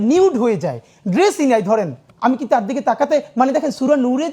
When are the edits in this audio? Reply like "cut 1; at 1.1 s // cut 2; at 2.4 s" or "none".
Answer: cut 1; at 2.0 s